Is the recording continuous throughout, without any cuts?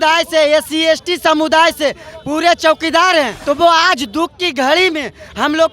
no; 1 cut; at 3.4 s

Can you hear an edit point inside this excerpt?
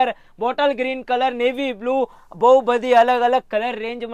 no; 0 cuts

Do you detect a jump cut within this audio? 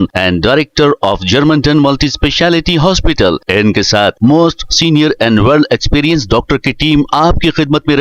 no; 0 cuts

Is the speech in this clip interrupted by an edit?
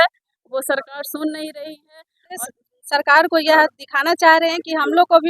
yes; 1 cut; at 2.4 s

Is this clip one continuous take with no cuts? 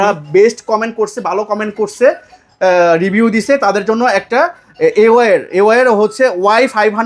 yes; 0 cuts

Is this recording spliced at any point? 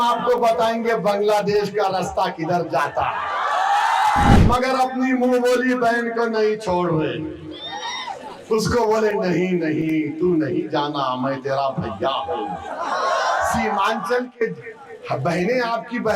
yes; 1 cut; at 4.4 s

